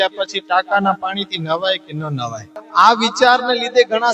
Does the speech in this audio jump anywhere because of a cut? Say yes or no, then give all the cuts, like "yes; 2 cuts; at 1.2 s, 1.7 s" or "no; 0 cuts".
yes; 1 cut; at 2.6 s